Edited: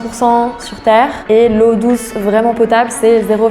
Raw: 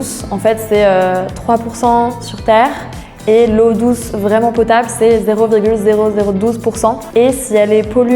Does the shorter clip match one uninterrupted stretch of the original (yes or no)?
no